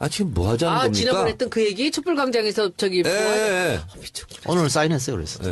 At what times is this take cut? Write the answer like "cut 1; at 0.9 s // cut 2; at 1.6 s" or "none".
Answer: none